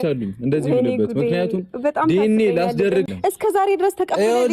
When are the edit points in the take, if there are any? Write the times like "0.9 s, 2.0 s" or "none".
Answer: 3.1 s